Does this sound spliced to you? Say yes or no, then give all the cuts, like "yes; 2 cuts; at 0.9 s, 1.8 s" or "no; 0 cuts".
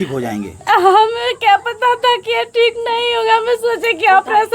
no; 0 cuts